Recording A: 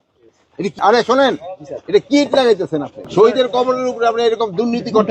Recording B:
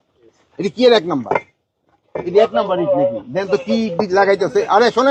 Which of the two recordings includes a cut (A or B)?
A